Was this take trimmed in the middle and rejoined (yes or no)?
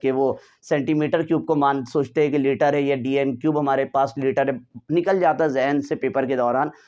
no